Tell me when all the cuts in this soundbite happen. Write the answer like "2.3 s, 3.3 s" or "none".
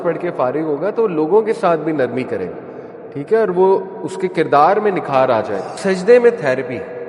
5.8 s